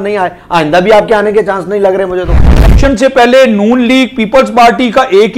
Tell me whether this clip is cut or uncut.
cut